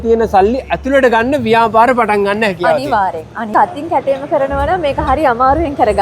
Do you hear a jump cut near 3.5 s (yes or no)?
yes